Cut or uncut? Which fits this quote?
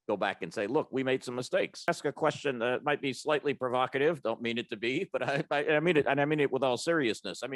cut